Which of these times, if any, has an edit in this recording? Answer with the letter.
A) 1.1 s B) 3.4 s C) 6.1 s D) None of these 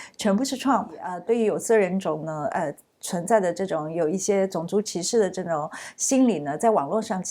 A